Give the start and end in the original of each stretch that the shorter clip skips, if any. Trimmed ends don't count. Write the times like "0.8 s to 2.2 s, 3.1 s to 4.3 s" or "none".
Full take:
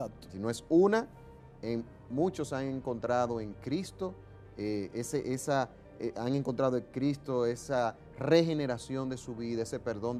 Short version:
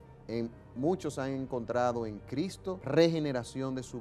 4.1 s to 8.1 s